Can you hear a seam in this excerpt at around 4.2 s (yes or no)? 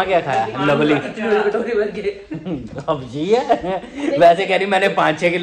no